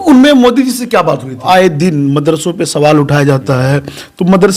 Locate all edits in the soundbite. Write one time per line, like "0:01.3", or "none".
0:01.4